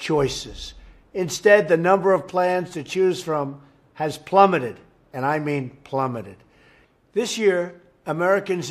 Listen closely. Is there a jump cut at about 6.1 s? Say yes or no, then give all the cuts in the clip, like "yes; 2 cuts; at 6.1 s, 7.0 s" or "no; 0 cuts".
yes; 1 cut; at 6.1 s